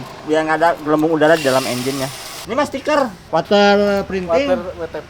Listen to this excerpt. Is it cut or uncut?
cut